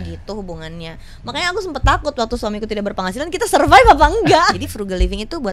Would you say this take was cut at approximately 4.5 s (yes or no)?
yes